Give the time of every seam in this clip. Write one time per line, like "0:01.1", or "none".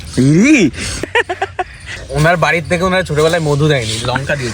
0:01.0
0:02.0